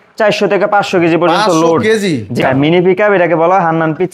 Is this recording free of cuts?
no; 1 cut; at 2.4 s

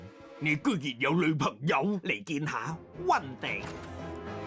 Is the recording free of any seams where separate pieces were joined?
no; 1 cut; at 3.6 s

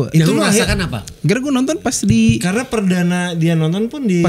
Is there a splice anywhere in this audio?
no; 0 cuts

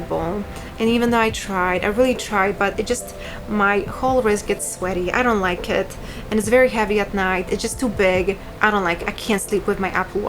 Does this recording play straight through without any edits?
yes; 0 cuts

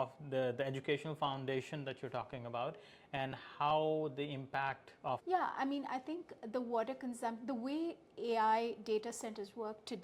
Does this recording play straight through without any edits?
no; 1 cut; at 5.2 s

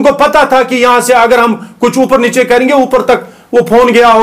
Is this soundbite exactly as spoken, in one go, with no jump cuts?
yes; 0 cuts

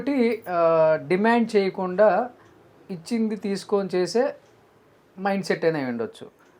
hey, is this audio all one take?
yes; 0 cuts

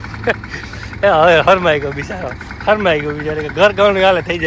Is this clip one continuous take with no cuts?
yes; 0 cuts

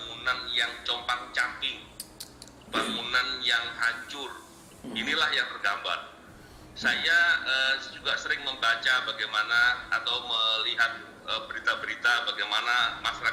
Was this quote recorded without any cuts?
yes; 0 cuts

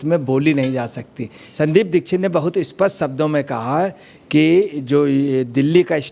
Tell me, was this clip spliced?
yes; 1 cut; at 1.5 s

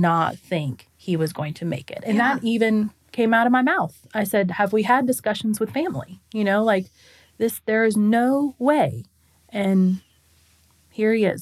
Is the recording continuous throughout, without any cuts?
yes; 0 cuts

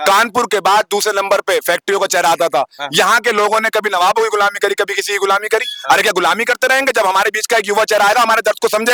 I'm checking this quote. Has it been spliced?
no; 0 cuts

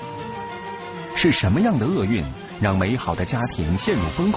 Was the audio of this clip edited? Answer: no; 0 cuts

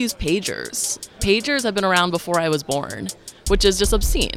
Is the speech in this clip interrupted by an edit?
yes; 1 cut; at 1.0 s

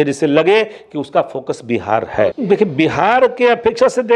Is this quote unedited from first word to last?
no; 1 cut; at 2.3 s

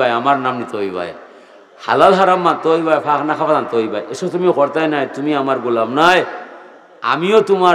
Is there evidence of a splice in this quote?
no; 0 cuts

